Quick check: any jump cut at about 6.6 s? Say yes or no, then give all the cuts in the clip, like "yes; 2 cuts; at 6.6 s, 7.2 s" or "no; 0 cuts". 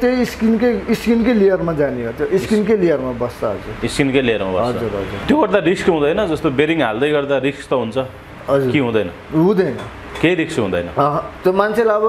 no; 1 cut; at 5.1 s